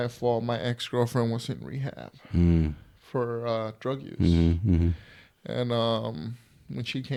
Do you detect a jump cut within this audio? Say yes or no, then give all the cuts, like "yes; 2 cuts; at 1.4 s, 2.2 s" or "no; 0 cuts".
no; 0 cuts